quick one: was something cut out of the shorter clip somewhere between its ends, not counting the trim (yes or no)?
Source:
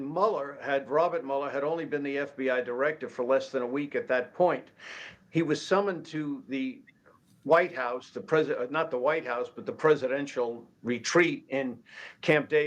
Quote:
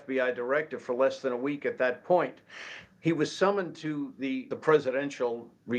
yes